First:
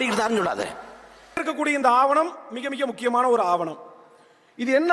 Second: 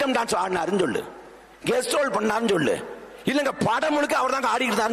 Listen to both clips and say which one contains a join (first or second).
first